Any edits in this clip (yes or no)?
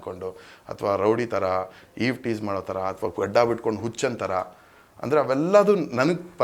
no